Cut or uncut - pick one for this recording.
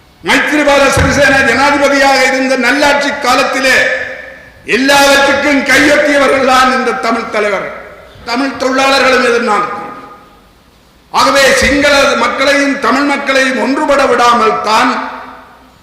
cut